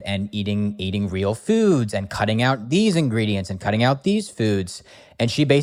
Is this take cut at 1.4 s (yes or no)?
no